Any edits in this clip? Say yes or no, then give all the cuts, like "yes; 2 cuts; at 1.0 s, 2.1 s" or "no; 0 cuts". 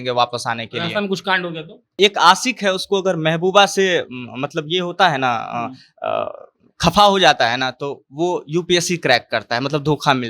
yes; 1 cut; at 2.0 s